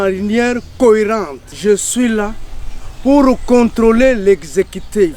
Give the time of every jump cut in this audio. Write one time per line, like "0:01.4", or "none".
0:01.5